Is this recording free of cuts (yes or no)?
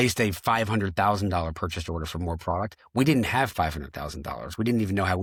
yes